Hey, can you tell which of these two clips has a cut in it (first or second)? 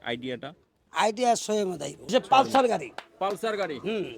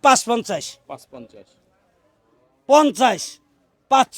first